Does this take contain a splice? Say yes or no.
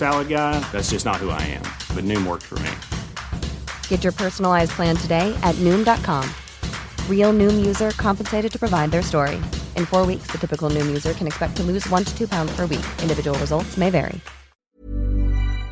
yes